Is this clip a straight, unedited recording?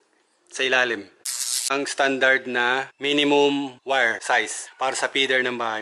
no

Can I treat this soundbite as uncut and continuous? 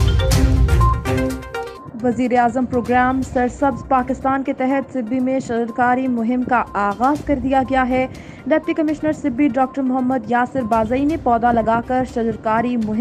no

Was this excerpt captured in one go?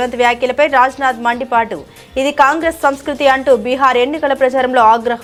yes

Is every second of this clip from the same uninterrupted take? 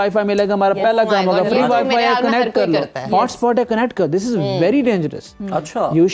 yes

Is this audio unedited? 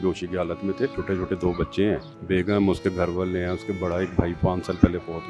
no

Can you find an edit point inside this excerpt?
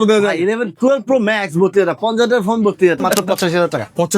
yes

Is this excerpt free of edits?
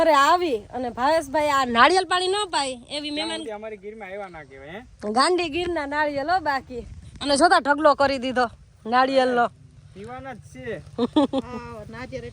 yes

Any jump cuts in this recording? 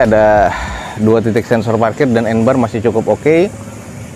no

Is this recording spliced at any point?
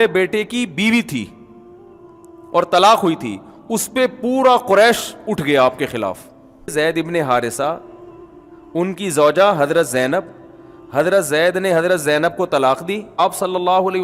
yes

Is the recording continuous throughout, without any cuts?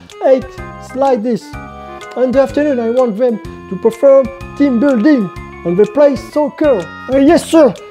no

